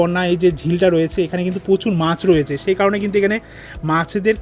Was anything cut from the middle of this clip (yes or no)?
no